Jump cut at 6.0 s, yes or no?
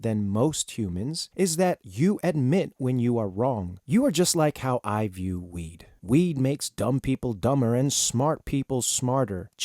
no